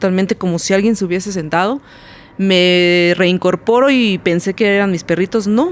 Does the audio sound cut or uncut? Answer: uncut